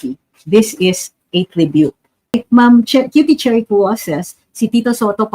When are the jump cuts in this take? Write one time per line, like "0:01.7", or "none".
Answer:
0:02.4